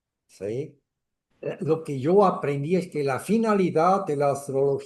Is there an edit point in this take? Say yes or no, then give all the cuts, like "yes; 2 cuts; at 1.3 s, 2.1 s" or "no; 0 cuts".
yes; 1 cut; at 1.3 s